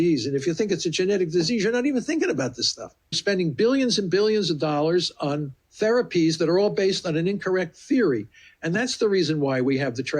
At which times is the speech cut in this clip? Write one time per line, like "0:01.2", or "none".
0:03.2